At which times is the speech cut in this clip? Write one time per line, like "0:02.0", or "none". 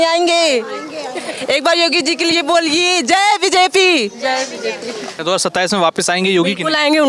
0:05.1